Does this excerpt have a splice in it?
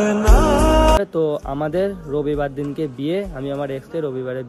yes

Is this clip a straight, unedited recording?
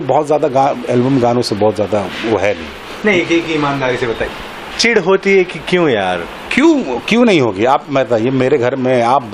yes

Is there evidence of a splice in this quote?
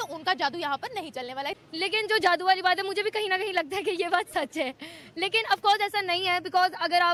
no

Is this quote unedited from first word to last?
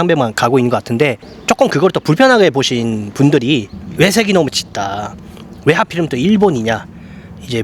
no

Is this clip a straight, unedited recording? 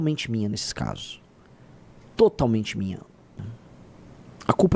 no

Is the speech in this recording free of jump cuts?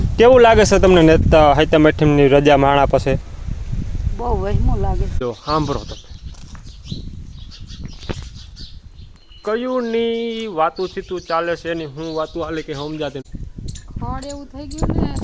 no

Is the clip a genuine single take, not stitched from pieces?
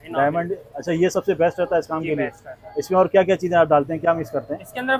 yes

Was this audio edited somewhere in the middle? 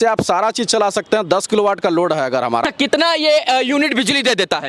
yes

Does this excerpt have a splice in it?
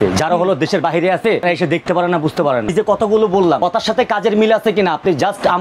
yes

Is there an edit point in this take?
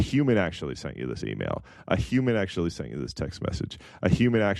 no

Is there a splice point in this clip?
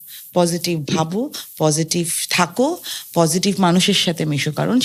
no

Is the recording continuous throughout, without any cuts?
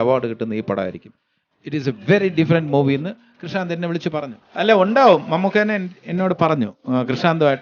no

